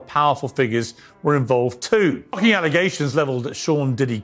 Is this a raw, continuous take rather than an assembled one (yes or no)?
no